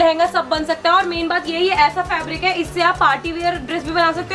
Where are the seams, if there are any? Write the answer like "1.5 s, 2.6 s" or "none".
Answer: none